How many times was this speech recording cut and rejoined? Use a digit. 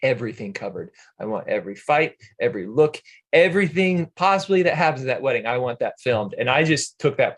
0